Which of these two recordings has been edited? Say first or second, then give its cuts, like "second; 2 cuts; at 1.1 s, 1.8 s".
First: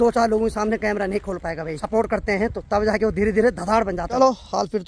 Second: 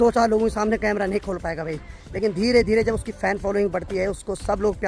first; 2 cuts; at 1.7 s, 4.2 s